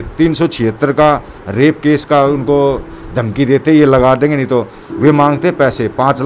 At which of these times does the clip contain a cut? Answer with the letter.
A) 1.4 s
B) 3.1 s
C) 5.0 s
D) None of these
D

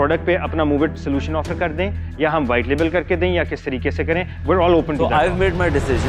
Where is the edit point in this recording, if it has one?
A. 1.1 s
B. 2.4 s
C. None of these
C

